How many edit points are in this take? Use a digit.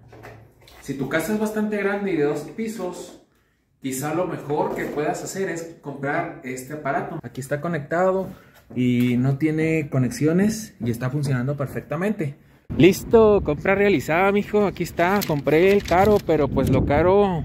2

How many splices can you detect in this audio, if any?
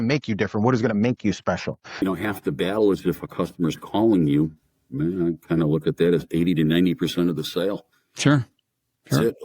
1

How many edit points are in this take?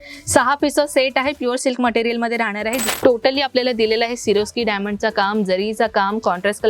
1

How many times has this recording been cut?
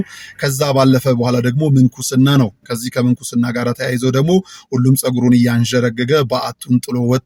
0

